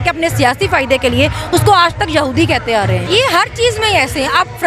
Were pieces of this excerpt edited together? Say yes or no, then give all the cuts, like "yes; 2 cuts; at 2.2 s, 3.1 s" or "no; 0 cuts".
yes; 1 cut; at 3.0 s